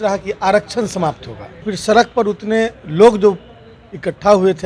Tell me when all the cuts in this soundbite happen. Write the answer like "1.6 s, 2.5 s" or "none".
1.7 s

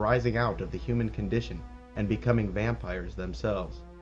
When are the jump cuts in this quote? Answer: 2.2 s

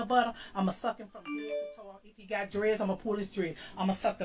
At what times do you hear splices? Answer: none

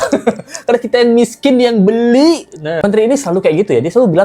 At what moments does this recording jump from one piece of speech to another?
none

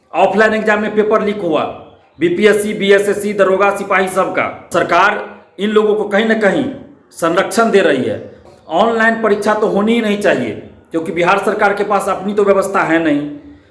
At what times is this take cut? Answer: 4.6 s, 8.4 s

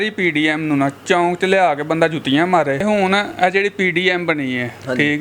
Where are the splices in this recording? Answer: 2.8 s

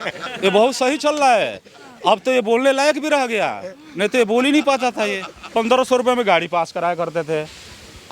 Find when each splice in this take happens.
5.4 s

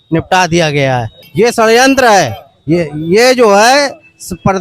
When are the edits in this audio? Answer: 1.2 s

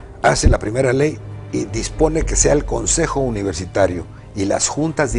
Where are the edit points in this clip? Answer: 3.5 s

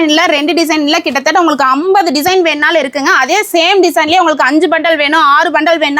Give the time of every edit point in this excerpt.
none

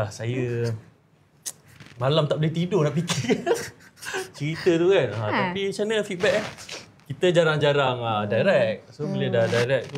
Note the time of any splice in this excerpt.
none

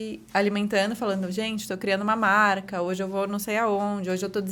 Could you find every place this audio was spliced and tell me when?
none

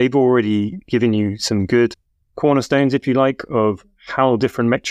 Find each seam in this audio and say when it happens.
none

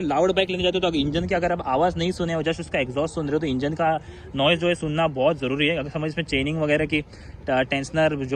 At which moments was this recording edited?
none

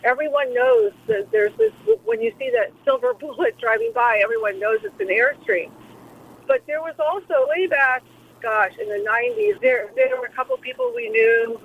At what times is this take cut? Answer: 2.8 s

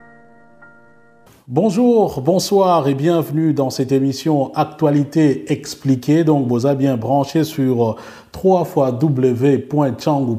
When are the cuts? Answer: 1.1 s

